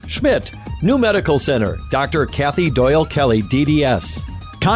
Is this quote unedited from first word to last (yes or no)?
no